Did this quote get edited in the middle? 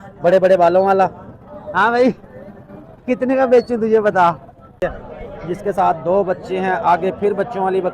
yes; 1 cut; at 4.8 s

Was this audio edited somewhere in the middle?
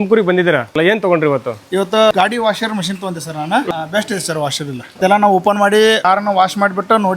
yes; 3 cuts; at 2.1 s, 5.0 s, 6.0 s

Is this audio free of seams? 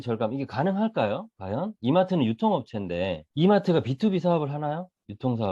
no; 1 cut; at 3.2 s

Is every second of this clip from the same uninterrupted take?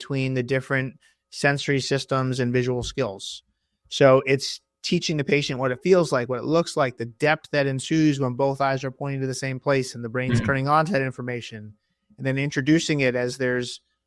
yes; 0 cuts

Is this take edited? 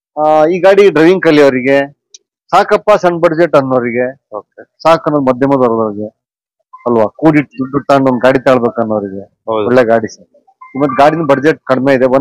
no; 0 cuts

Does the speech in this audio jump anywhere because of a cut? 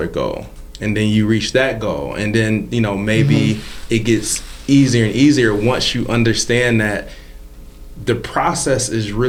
no; 0 cuts

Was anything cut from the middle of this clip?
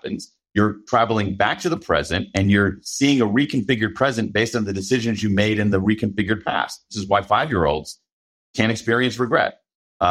yes; 1 cut; at 7.0 s

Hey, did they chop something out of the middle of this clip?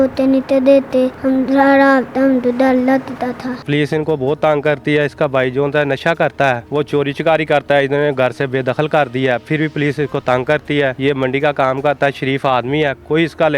yes; 4 cuts; at 1.2 s, 3.6 s, 6.6 s, 11.0 s

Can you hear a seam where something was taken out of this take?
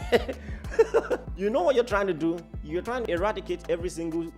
yes; 2 cuts; at 1.3 s, 3.0 s

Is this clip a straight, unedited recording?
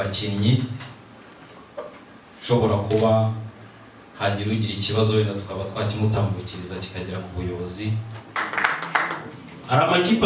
no; 1 cut; at 8.4 s

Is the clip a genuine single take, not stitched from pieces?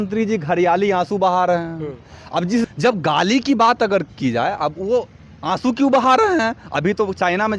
no; 1 cut; at 2.7 s

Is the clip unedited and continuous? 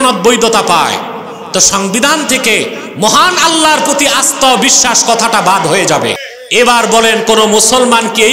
no; 1 cut; at 6.3 s

